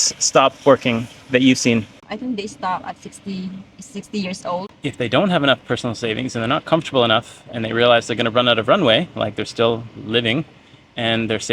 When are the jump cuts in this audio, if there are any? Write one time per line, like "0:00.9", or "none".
0:02.1
0:04.7